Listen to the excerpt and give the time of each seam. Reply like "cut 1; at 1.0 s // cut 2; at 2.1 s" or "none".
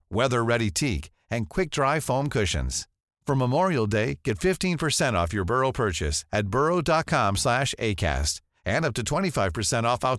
none